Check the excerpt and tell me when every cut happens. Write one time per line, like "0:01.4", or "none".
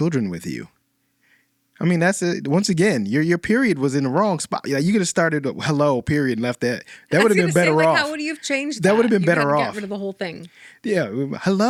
none